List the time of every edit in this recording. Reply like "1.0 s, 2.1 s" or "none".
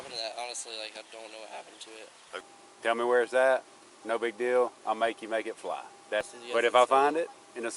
2.3 s, 6.3 s